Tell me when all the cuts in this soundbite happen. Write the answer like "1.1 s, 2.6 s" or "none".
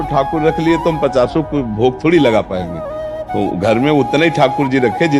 none